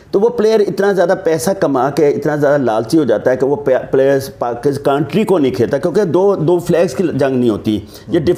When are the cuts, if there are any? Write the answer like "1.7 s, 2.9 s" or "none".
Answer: none